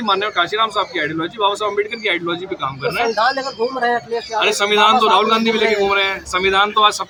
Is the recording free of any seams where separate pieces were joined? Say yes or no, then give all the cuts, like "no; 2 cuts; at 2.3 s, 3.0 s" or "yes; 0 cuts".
yes; 0 cuts